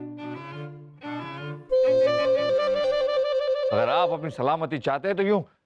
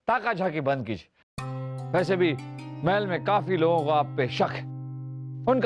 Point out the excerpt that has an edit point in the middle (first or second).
first